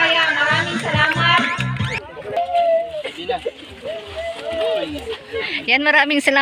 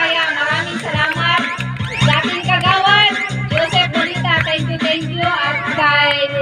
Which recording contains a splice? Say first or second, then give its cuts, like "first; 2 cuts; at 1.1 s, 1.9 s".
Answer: first; 1 cut; at 1.8 s